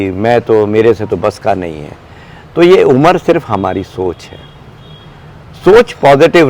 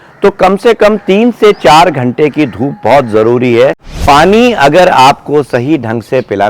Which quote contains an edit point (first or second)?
second